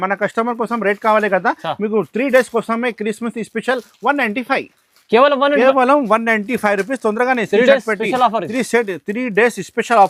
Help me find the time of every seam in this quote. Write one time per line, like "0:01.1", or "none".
none